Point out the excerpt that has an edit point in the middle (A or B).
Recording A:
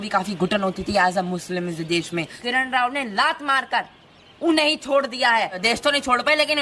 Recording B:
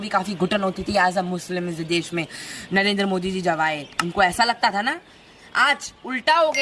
A